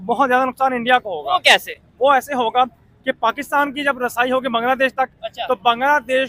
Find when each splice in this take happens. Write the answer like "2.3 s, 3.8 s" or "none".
none